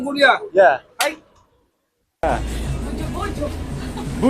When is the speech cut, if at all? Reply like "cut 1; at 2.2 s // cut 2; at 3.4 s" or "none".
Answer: cut 1; at 2.2 s